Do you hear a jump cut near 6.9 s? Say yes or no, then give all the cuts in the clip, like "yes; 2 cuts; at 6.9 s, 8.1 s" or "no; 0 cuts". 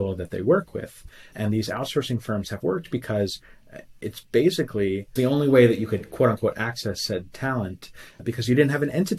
no; 3 cuts; at 1.3 s, 5.1 s, 8.2 s